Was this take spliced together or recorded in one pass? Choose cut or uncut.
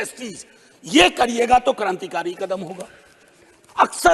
uncut